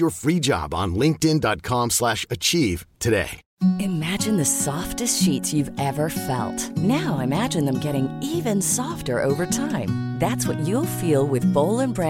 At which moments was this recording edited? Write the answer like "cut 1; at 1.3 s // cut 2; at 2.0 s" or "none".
cut 1; at 3.4 s